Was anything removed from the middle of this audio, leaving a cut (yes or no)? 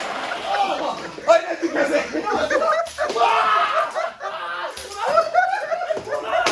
no